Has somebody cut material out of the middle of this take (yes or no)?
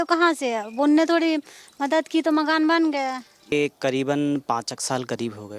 yes